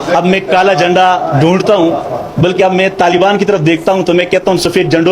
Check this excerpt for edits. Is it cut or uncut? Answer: uncut